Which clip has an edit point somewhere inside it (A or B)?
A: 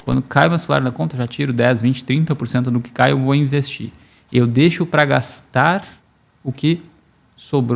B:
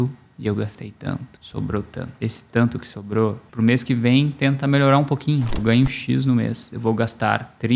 B